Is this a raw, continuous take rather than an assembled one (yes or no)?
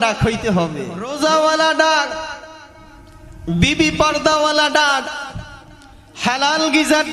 no